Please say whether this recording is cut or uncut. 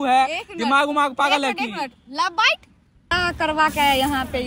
cut